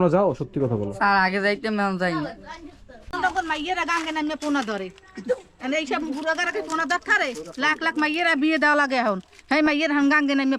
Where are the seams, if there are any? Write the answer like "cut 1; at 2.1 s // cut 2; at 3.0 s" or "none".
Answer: cut 1; at 3.1 s